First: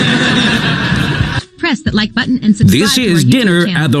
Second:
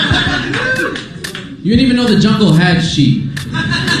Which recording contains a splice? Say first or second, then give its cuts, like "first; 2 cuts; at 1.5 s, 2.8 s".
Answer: first; 1 cut; at 2.6 s